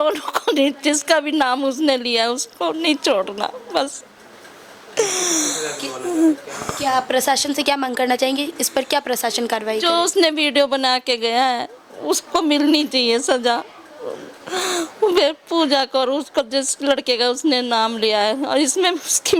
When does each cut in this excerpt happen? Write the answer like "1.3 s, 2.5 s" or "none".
none